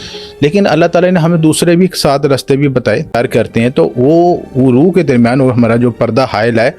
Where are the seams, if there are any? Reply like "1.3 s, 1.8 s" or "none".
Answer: 3.1 s